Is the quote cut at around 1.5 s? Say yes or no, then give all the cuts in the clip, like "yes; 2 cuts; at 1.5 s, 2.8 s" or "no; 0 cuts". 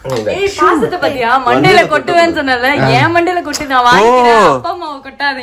no; 0 cuts